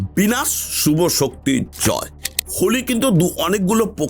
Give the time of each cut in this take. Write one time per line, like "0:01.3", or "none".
0:02.4

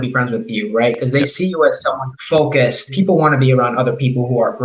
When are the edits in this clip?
0:02.1
0:02.9

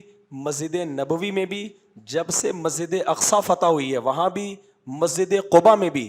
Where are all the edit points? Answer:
none

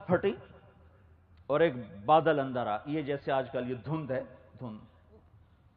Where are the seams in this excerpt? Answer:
none

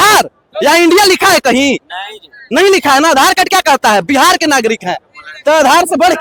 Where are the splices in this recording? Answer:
none

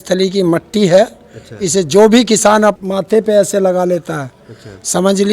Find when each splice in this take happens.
0:02.8

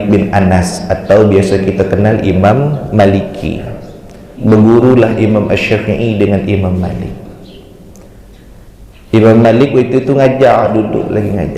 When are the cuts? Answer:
0:04.3

